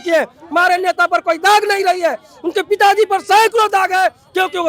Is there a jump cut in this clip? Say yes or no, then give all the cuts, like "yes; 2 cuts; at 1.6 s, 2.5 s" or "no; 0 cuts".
no; 0 cuts